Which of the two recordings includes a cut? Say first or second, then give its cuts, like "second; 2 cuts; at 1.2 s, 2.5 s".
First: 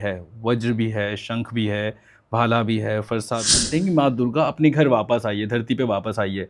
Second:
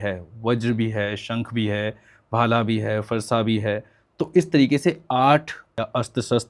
first; 1 cut; at 3.6 s